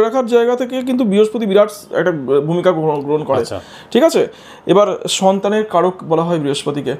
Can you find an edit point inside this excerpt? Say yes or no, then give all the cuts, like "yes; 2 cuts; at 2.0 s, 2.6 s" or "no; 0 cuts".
no; 0 cuts